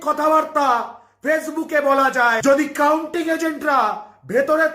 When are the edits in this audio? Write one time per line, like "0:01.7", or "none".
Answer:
0:02.4